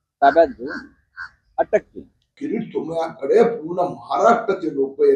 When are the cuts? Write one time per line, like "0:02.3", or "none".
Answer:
0:02.4